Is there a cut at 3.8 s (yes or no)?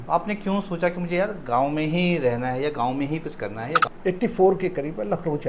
yes